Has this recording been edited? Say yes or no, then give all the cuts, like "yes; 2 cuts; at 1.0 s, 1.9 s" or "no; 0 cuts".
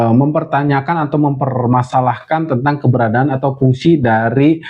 no; 0 cuts